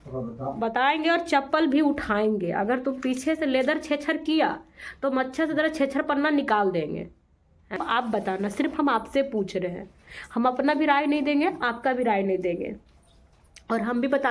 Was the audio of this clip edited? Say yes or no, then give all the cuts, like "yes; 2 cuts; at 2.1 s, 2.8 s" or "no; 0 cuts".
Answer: yes; 1 cut; at 7.8 s